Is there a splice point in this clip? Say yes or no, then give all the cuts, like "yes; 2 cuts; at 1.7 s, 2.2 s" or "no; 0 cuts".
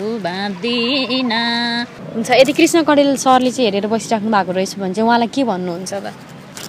yes; 1 cut; at 2.0 s